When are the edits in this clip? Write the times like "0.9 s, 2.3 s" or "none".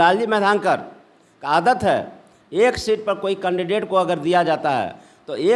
none